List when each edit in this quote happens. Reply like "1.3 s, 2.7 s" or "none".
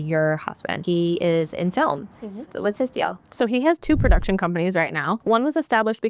0.8 s, 2.5 s, 5.2 s